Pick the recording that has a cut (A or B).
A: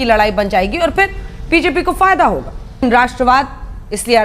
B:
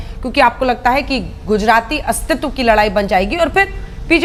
A